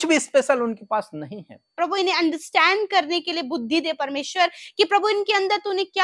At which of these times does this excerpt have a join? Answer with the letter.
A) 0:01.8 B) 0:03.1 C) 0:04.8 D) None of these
A